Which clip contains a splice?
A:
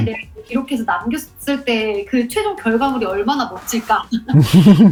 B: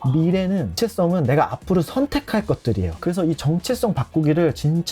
B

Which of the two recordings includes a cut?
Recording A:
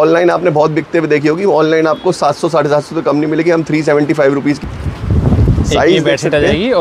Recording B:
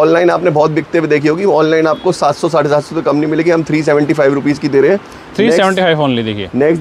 A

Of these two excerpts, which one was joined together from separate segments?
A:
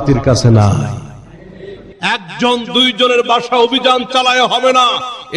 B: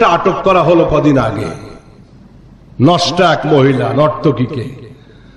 A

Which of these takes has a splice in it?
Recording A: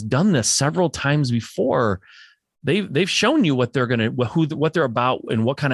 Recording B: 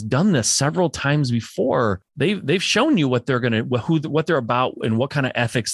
B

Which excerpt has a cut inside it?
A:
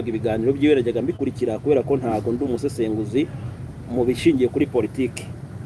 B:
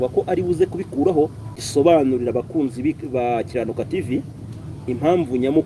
B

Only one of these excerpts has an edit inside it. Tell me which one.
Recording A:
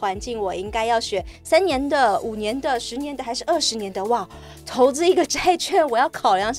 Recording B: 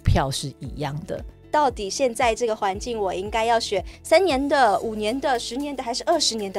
B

